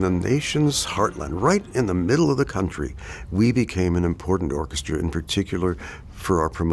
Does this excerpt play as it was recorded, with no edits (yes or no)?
yes